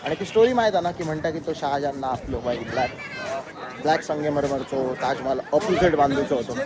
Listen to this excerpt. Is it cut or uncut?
uncut